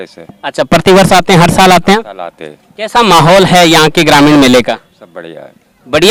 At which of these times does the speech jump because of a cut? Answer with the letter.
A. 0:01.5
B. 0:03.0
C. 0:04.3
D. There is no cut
D